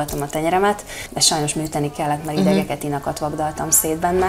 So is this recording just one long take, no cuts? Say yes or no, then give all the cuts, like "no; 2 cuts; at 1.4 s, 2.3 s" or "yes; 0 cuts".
no; 1 cut; at 1.1 s